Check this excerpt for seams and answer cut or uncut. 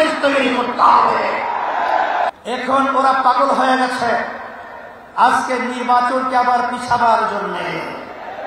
cut